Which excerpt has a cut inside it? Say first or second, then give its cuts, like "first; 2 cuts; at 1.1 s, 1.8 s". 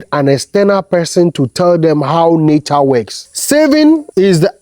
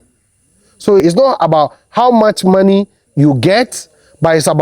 first; 1 cut; at 3.2 s